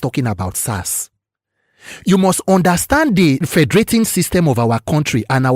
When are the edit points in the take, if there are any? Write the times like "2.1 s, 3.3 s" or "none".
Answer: 3.4 s